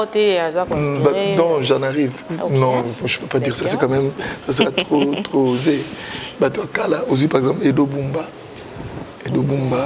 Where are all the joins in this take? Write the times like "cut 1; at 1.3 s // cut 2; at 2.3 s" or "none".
none